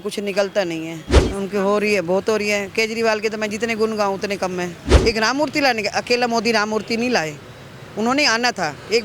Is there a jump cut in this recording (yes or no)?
yes